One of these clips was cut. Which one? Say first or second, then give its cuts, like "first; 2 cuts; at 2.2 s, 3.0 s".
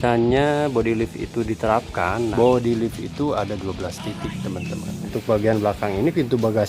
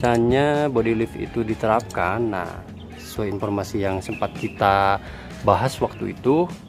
first; 2 cuts; at 2.3 s, 5.0 s